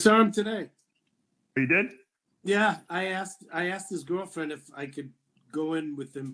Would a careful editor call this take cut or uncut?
uncut